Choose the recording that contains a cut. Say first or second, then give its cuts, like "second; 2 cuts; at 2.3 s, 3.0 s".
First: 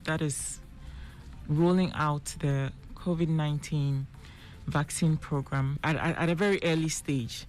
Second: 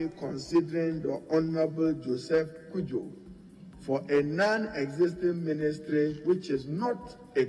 first; 1 cut; at 5.8 s